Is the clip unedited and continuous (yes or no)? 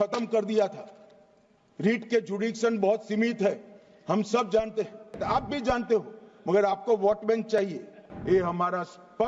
no